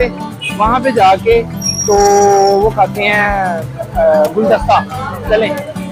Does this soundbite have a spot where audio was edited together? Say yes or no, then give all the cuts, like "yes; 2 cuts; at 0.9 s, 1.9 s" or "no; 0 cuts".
no; 0 cuts